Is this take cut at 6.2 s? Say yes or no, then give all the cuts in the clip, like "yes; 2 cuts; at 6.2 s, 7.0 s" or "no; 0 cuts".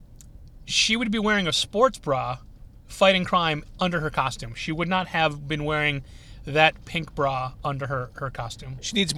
no; 0 cuts